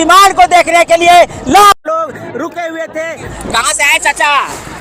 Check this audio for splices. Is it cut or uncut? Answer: cut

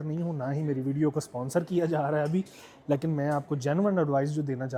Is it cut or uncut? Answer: uncut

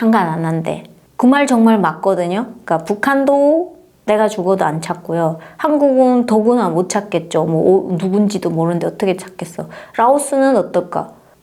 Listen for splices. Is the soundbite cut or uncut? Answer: uncut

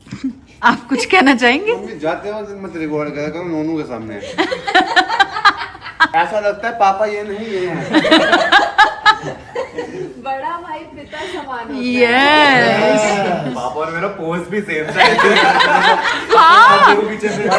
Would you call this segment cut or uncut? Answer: cut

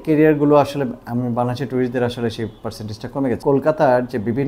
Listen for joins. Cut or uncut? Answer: cut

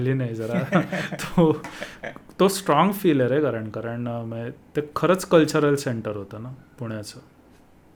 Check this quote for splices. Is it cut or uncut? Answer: uncut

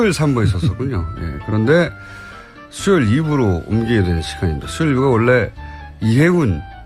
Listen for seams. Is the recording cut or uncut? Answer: uncut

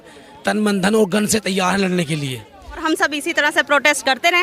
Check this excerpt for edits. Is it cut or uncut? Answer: cut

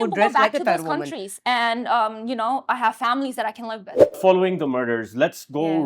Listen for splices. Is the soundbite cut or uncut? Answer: cut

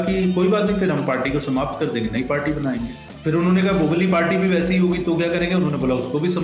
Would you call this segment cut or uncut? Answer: cut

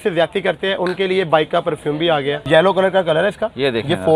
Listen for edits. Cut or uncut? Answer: cut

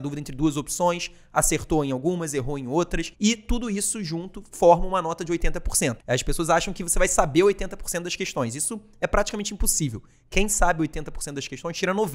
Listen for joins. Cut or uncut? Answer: cut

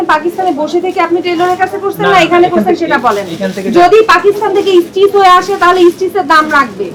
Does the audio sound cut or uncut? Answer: uncut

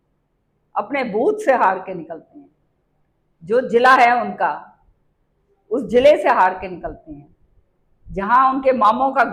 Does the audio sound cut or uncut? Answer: uncut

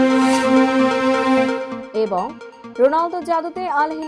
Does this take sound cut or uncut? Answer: cut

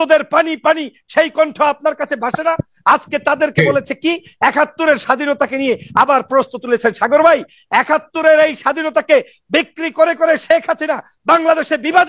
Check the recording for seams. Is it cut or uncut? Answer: uncut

